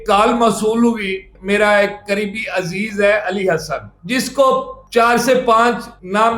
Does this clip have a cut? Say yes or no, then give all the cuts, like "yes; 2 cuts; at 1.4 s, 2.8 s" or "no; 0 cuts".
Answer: yes; 1 cut; at 1.3 s